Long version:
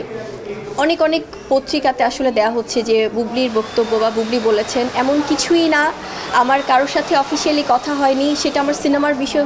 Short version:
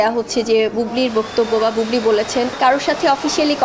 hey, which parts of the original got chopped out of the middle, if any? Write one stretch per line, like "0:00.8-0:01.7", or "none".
0:04.9-0:06.6

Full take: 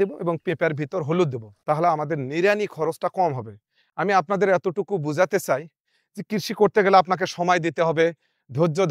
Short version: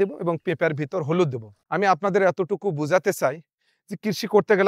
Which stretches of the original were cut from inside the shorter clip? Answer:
0:01.5-0:03.7

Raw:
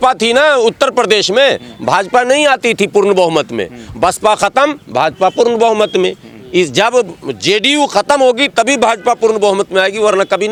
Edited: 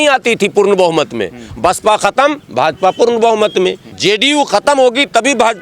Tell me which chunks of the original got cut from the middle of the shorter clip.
0:06.3-0:07.3

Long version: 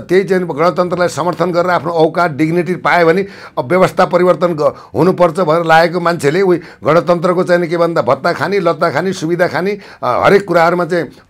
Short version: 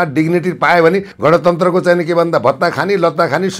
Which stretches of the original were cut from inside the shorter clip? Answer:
0:03.3-0:06.7

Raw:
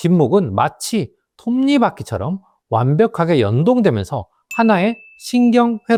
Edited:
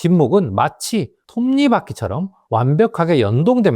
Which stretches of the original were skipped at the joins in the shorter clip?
0:01.2-0:01.3
0:02.4-0:02.5

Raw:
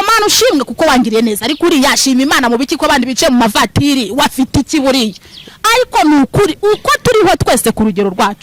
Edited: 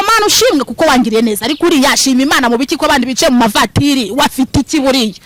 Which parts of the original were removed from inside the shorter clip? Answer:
none

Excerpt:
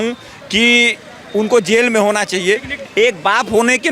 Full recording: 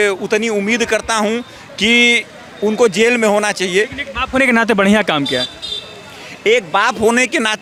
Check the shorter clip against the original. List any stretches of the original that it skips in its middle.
0:04.0-0:06.2

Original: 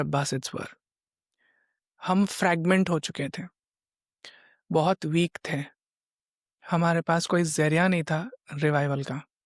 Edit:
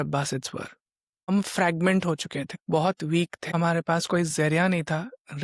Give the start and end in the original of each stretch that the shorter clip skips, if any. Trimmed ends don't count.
0:01.3-0:02.1
0:03.4-0:04.6
0:05.4-0:06.6

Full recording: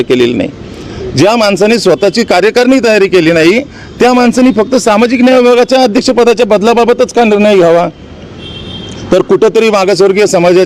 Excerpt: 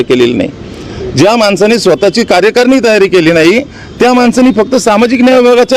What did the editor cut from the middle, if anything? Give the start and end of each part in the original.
none

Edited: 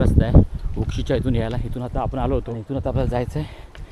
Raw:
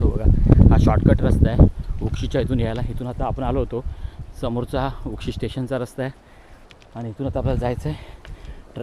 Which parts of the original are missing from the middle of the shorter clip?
0:03.8-0:07.0

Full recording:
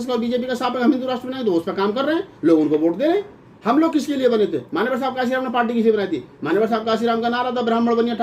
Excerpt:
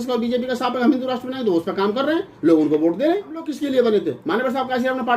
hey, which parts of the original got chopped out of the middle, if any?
0:03.5-0:04.0

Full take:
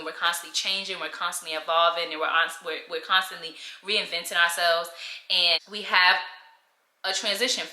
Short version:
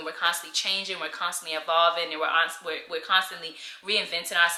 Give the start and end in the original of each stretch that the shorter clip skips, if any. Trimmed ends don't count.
none

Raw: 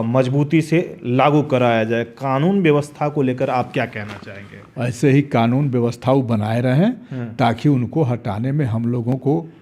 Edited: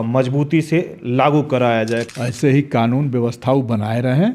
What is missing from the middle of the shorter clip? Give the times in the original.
0:02.1-0:04.7

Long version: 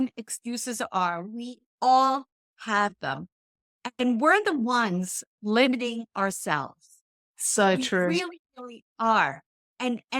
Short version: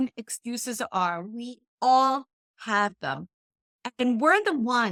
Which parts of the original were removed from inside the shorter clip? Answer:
none

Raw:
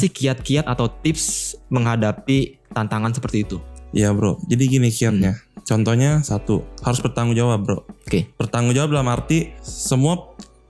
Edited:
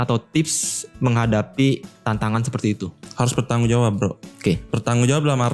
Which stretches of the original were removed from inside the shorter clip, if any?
0:03.8-0:06.7

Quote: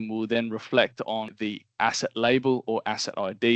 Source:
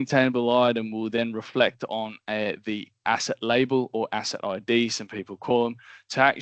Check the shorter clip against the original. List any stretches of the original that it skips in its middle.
0:02.2-0:02.6

